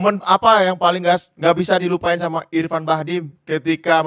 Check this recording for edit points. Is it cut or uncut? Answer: uncut